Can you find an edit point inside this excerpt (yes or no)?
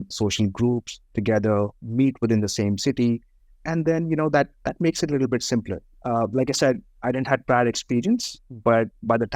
yes